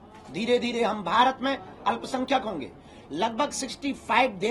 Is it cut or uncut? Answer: uncut